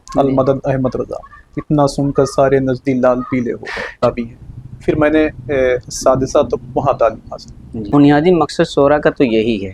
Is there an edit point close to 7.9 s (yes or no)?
yes